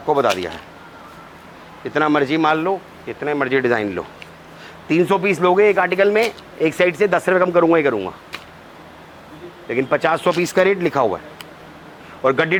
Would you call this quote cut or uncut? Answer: uncut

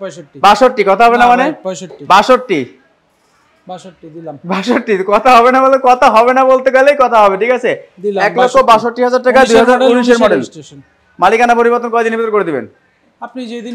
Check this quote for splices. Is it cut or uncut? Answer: uncut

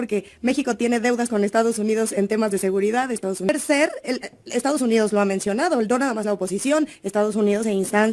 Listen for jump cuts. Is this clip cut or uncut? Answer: cut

